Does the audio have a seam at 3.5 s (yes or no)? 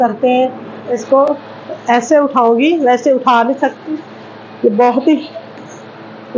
no